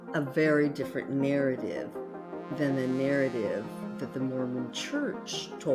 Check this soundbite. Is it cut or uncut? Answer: uncut